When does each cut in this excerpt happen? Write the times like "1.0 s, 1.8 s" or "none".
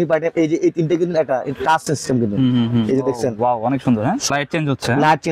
4.3 s